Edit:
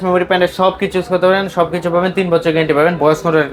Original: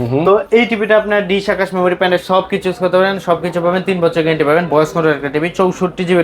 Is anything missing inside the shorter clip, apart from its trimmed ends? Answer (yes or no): no